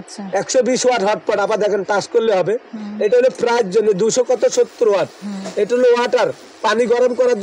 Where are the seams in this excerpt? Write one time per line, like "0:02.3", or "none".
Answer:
none